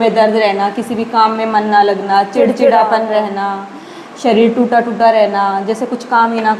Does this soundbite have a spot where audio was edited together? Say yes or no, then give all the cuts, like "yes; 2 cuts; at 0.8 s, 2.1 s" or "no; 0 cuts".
no; 0 cuts